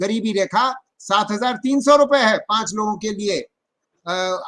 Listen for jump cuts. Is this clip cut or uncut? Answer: uncut